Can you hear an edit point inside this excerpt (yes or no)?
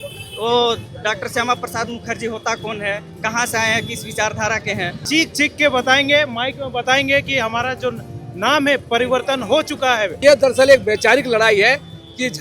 yes